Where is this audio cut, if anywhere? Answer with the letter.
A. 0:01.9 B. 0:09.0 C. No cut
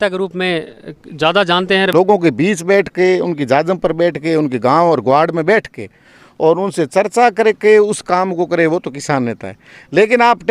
A